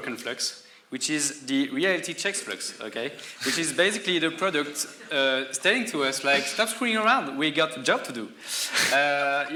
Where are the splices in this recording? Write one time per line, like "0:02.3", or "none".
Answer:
none